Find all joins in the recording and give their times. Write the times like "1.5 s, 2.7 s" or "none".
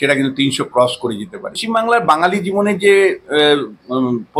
1.6 s